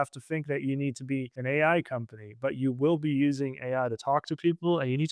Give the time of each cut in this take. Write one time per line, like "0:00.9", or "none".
0:01.3